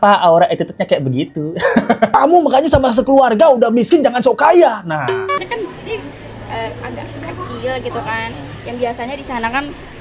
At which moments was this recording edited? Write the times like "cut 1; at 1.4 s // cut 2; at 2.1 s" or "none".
cut 1; at 2.1 s // cut 2; at 5.4 s